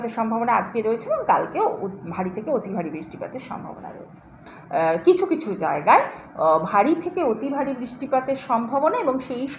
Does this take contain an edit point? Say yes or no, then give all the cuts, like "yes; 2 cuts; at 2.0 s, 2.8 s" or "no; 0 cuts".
yes; 1 cut; at 4.5 s